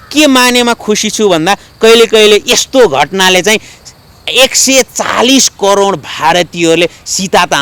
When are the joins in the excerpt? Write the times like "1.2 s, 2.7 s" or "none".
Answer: none